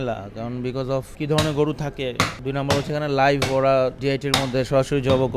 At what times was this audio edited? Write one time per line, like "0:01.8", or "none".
0:01.1
0:02.4
0:04.0